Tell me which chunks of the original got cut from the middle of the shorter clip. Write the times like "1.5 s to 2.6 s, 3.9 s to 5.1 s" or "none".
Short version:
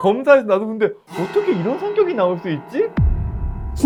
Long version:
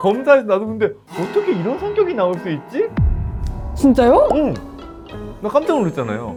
none

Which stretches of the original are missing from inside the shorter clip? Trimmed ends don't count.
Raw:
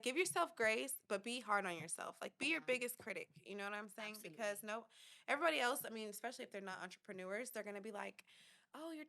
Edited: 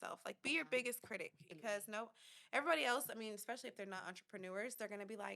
3.4 s to 4.2 s

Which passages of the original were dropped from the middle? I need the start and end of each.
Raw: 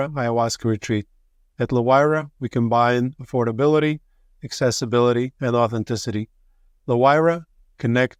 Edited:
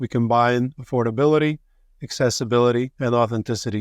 none

